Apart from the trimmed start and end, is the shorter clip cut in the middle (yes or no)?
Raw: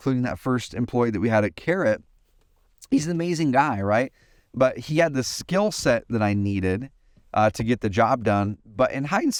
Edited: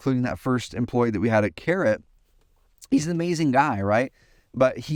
no